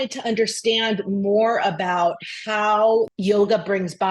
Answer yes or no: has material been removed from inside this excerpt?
yes